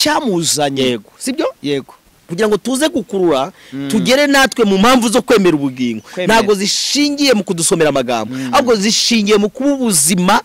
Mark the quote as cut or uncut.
uncut